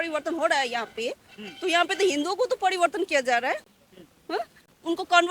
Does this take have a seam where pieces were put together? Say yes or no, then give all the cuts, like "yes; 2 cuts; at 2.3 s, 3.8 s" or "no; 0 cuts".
no; 0 cuts